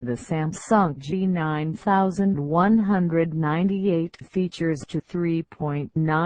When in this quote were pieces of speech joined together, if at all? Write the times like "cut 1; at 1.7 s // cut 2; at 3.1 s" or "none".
cut 1; at 0.9 s